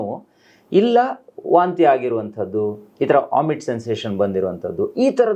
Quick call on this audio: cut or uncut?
uncut